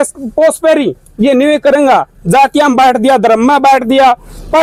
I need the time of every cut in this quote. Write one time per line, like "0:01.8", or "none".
none